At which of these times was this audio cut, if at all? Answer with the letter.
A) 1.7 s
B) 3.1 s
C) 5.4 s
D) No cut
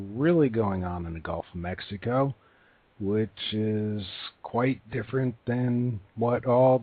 A